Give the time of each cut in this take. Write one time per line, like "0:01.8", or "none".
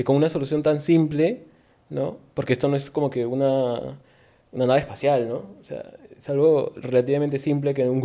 none